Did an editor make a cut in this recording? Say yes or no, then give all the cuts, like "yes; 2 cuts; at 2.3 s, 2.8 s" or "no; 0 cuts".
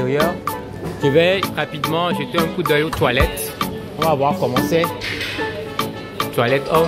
no; 0 cuts